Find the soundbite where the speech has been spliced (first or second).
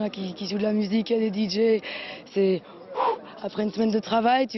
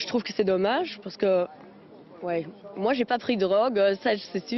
second